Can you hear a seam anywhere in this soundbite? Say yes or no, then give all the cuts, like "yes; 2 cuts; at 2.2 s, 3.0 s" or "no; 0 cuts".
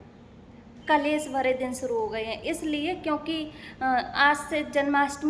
no; 0 cuts